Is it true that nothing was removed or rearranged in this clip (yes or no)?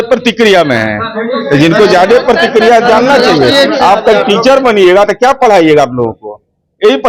yes